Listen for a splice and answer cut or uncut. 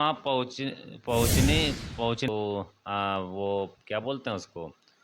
cut